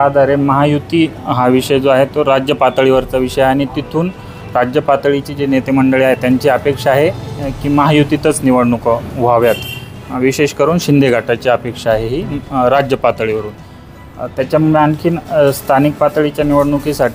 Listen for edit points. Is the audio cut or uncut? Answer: uncut